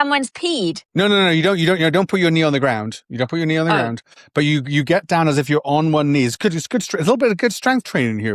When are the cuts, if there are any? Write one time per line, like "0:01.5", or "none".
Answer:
none